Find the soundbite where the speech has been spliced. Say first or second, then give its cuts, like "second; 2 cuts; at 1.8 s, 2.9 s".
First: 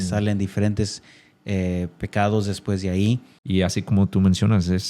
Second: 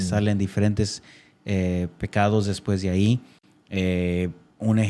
first; 1 cut; at 3.3 s